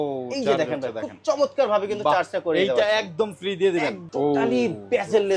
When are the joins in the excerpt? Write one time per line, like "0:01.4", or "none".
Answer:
0:04.0